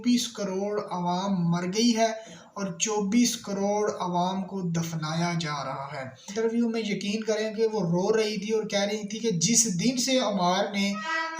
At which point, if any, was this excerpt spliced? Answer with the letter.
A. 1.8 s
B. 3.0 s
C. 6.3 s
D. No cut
C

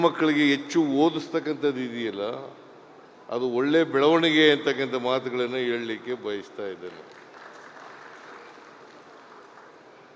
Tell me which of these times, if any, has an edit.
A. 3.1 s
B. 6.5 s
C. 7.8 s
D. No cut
D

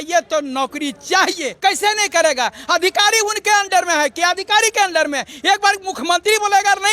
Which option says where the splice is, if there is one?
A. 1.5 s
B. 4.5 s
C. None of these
A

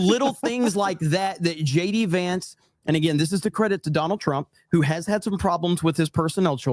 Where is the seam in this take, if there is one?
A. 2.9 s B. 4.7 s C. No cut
C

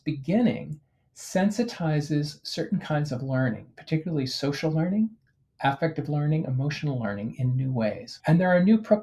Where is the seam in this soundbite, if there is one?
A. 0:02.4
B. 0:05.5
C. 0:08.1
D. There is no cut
C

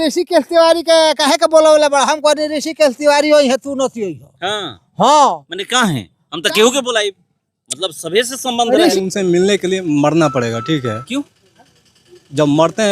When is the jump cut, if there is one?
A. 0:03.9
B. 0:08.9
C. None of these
B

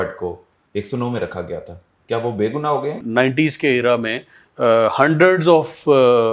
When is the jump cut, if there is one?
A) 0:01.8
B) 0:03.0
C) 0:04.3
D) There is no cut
B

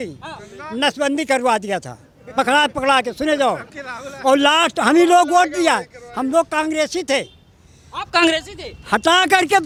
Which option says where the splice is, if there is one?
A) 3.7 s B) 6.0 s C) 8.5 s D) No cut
D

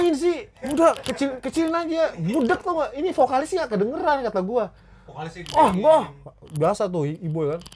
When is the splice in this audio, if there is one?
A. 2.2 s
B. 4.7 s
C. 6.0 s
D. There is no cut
D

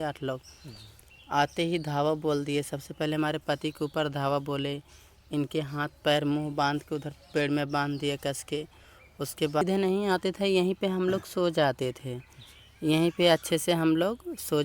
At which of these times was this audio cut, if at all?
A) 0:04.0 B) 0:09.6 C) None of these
B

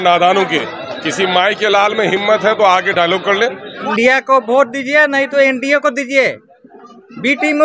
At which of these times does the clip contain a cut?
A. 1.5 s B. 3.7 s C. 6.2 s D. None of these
B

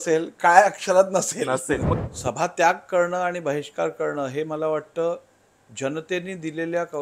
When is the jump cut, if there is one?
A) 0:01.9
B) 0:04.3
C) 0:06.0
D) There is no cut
A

